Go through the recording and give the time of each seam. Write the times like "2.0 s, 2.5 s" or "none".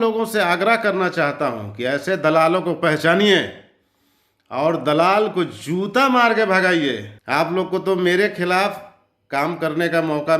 7.1 s

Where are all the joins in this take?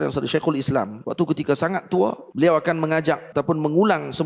1.0 s, 2.2 s, 3.2 s

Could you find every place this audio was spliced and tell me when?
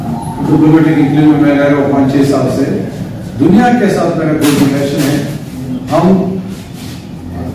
none

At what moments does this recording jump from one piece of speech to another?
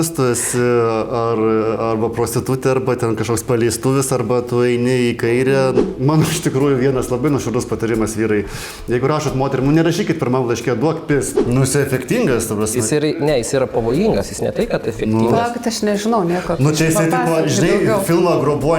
5.8 s, 11.3 s

